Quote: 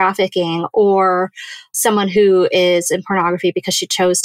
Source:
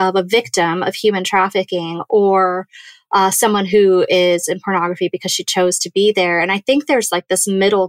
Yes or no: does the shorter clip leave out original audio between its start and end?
yes